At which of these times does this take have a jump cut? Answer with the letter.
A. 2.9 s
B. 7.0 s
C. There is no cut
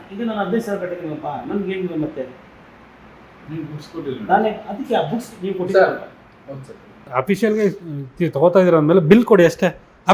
B